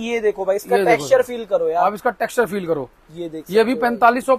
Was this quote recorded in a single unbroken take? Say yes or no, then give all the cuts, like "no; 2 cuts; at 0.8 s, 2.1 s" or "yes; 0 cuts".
yes; 0 cuts